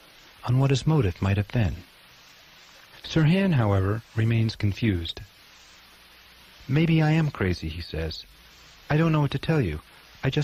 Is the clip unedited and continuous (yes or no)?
yes